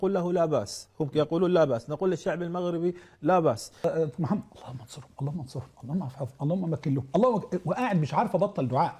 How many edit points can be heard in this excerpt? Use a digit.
1